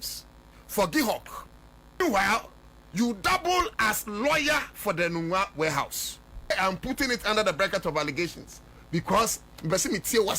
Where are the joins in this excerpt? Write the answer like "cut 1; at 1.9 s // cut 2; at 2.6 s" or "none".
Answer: cut 1; at 2.0 s // cut 2; at 6.5 s